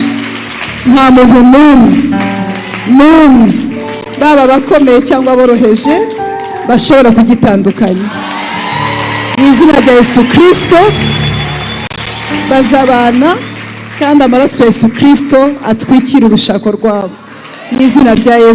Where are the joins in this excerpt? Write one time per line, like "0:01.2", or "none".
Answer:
none